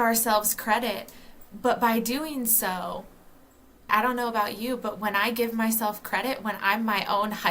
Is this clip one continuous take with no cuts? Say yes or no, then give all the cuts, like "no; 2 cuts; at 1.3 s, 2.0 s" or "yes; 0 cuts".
no; 1 cut; at 3.9 s